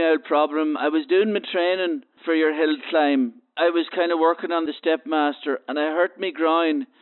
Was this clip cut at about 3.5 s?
yes; 3 cuts; at 2.1 s, 3.5 s, 4.7 s

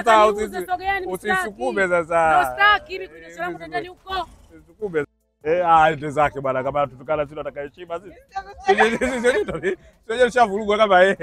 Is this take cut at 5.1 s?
yes; 1 cut; at 5.1 s

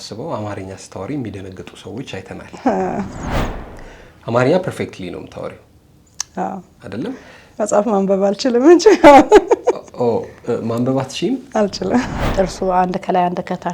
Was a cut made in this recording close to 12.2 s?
yes; 1 cut; at 12.2 s

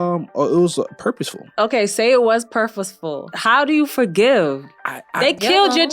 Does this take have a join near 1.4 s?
yes; 2 cuts; at 1.4 s, 3.4 s

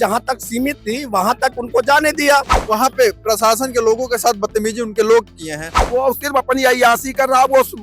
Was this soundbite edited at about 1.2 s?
no; 2 cuts; at 2.6 s, 5.7 s

